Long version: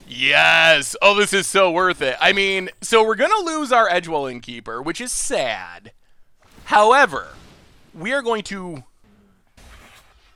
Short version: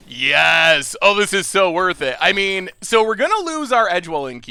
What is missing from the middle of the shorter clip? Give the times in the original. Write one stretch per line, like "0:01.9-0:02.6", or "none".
none